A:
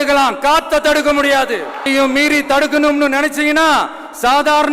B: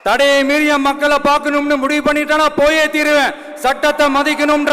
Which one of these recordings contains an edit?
A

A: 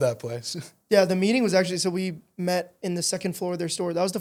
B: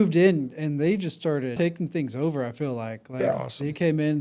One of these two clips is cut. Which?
B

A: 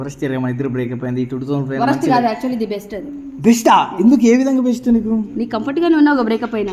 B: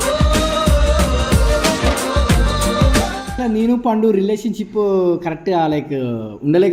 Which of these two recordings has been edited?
B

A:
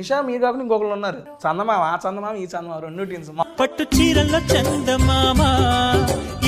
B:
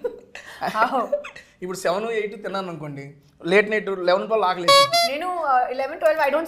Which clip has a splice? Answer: A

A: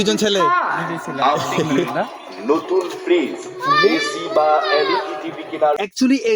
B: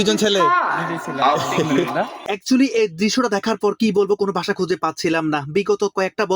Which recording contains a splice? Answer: B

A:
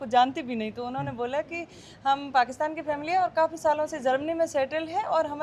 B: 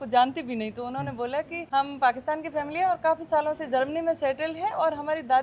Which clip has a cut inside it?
B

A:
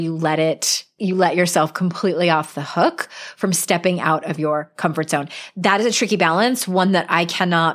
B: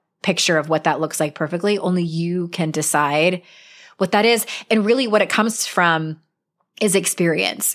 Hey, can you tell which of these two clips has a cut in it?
A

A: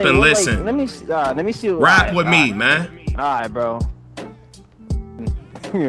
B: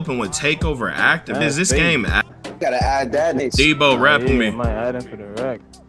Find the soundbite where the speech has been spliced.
B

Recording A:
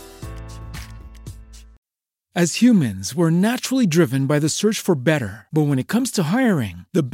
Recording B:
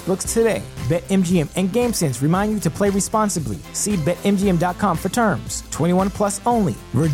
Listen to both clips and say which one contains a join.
A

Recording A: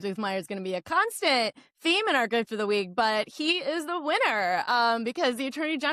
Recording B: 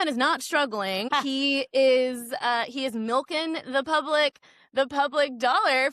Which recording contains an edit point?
B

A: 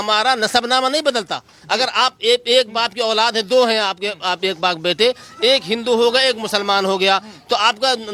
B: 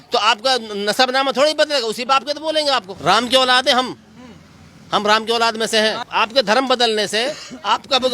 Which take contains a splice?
B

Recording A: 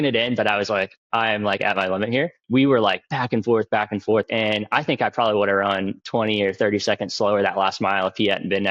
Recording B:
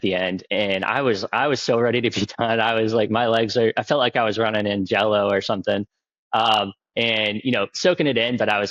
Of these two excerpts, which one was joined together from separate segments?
A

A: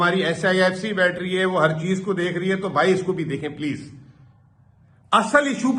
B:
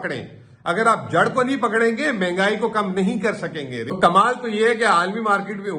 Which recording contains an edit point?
B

